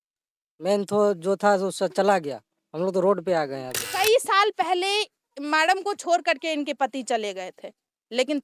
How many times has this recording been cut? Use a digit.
1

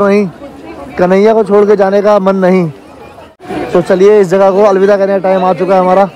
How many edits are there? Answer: 1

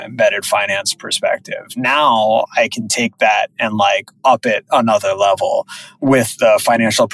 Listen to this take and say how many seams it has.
0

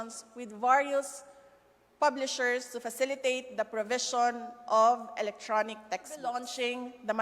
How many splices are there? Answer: 1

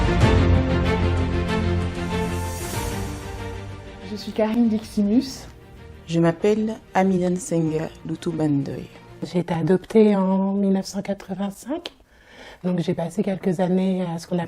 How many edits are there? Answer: 1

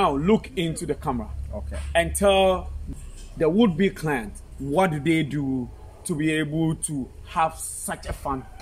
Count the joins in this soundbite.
1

